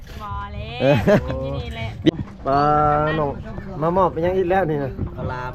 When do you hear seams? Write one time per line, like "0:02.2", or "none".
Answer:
0:02.1